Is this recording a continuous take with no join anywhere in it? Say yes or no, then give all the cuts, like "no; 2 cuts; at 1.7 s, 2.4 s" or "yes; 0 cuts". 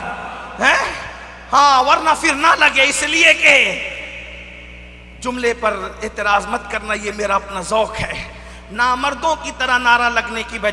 yes; 0 cuts